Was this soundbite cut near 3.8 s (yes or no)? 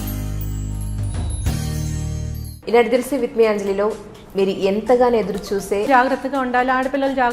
no